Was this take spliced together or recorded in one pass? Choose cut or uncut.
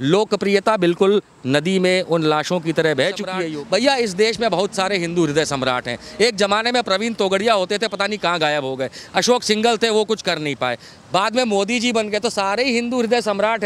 cut